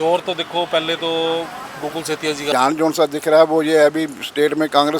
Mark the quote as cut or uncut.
cut